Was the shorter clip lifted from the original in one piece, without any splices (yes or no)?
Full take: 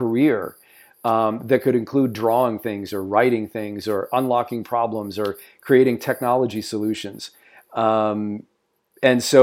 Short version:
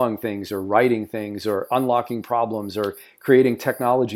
yes